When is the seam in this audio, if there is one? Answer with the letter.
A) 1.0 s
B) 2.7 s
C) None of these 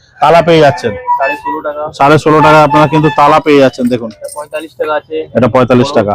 A